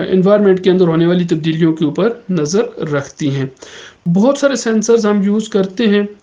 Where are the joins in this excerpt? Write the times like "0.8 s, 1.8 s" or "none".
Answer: 4.0 s